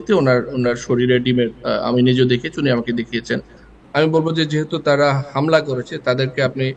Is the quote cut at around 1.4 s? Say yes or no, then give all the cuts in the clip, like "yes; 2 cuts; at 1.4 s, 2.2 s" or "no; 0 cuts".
no; 1 cut; at 3.7 s